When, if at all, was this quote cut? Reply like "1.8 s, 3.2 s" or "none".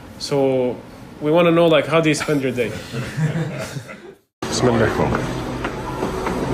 4.0 s